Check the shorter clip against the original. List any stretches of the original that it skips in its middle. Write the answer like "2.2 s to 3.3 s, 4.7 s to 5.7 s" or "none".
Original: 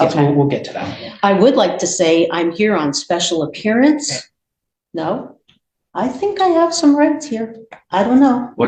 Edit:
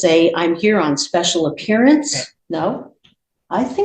4.2 s to 4.7 s